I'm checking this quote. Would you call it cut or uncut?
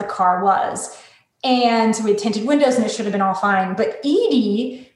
uncut